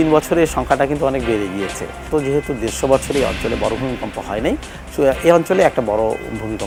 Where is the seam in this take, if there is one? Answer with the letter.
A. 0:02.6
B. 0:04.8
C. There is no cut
C